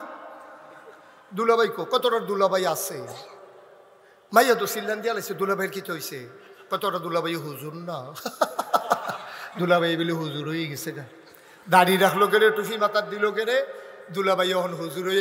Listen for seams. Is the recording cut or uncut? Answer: uncut